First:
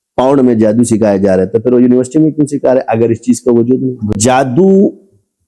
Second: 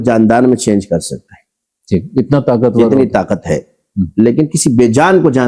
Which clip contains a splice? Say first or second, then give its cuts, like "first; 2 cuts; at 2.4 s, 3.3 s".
first; 1 cut; at 4.1 s